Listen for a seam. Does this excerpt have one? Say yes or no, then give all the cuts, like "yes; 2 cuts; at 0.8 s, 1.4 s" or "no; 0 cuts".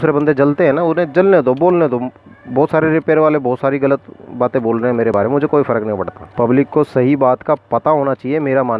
no; 0 cuts